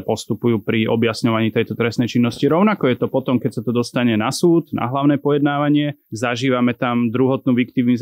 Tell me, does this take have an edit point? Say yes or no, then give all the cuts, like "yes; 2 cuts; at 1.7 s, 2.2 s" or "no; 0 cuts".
no; 0 cuts